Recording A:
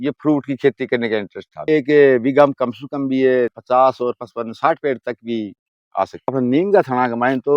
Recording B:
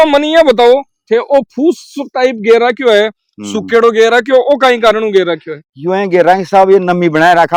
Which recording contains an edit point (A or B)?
A